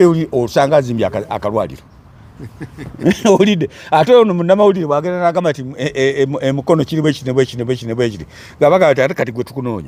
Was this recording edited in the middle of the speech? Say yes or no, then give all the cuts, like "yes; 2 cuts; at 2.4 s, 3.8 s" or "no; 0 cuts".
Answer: no; 0 cuts